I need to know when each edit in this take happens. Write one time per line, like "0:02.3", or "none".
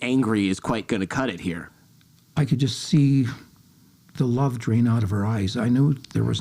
0:01.6